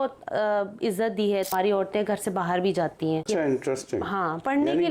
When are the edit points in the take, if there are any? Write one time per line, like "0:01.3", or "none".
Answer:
0:01.5
0:03.2

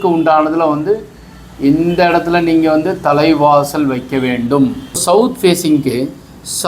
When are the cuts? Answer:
0:05.0

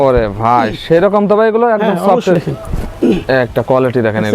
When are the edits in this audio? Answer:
0:02.3

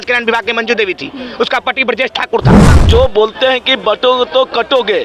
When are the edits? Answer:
0:02.7

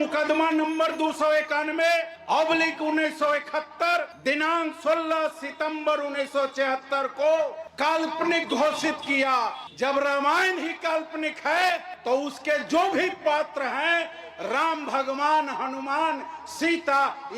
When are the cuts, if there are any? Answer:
none

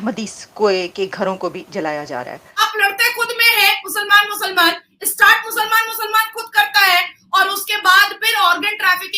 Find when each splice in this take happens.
0:02.4

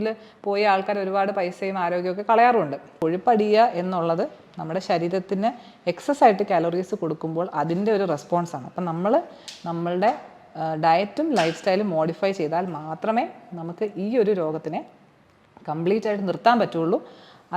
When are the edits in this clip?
0:02.9

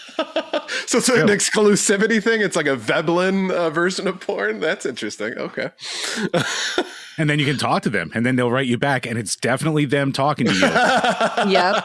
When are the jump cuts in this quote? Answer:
none

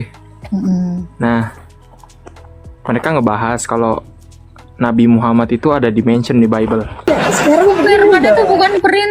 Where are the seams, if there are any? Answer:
0:07.1

